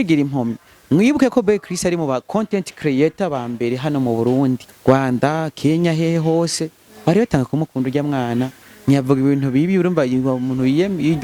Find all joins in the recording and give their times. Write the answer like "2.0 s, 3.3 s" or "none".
4.7 s